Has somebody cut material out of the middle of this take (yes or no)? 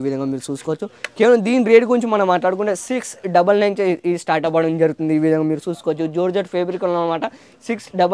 no